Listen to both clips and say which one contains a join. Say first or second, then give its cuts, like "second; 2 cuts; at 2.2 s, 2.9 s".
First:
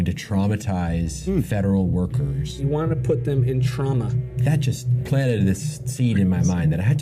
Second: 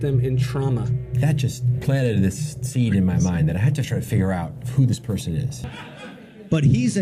second; 1 cut; at 5.7 s